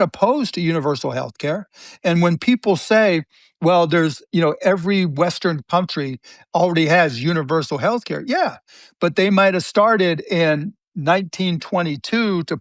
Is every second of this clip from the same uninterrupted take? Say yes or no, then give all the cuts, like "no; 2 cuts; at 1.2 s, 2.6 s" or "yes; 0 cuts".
yes; 0 cuts